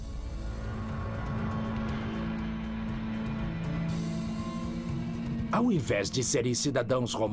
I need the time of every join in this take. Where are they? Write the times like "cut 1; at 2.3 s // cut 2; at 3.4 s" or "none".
cut 1; at 2.8 s